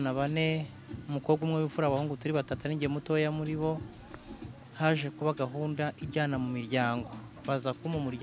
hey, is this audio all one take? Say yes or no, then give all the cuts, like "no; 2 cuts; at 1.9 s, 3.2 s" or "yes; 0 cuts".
yes; 0 cuts